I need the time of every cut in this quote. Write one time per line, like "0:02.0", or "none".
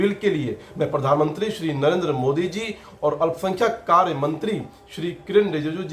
none